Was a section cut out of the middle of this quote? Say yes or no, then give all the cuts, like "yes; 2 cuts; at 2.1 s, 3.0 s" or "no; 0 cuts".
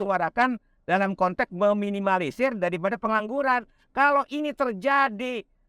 no; 0 cuts